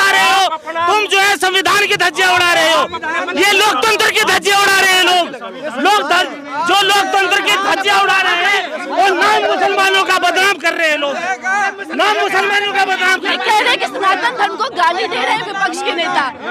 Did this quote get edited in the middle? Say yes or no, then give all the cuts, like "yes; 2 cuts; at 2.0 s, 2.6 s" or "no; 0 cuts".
no; 0 cuts